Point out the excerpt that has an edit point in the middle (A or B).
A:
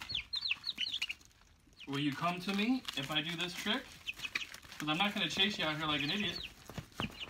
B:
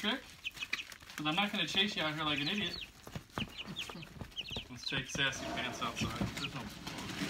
B